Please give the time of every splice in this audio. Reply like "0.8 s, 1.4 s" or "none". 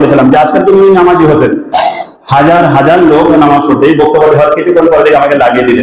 none